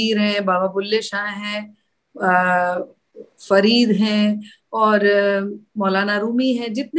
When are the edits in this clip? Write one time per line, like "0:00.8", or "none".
none

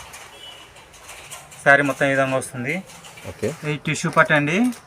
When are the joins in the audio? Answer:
0:03.6

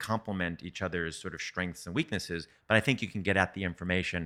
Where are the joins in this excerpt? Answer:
0:02.5

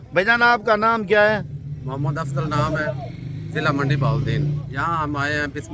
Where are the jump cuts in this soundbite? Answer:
0:03.1
0:04.6

